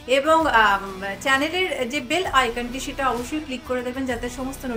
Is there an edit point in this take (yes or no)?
no